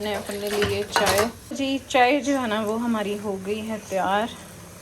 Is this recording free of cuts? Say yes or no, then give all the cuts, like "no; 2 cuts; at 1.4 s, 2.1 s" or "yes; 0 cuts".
no; 1 cut; at 1.6 s